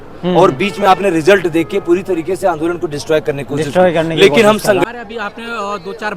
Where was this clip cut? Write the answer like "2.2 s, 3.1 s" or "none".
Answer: 4.9 s